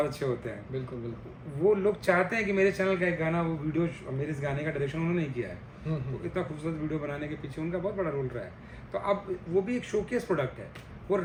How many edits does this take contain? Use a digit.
0